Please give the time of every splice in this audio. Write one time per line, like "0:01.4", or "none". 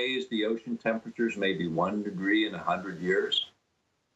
none